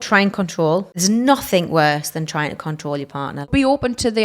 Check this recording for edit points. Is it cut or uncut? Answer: cut